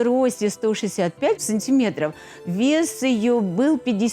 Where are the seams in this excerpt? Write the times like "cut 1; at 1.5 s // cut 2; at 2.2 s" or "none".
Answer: cut 1; at 1.4 s